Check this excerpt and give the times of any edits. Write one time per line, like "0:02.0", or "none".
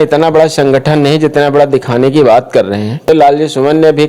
0:03.1